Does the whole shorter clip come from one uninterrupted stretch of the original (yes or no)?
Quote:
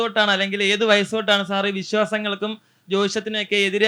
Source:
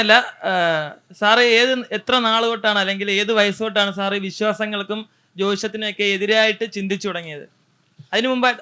yes